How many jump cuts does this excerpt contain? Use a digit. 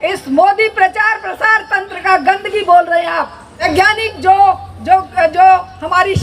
1